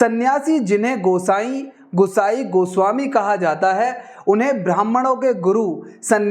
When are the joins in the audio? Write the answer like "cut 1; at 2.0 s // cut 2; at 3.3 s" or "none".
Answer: none